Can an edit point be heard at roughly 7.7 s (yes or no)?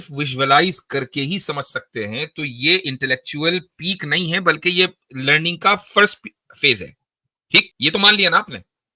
yes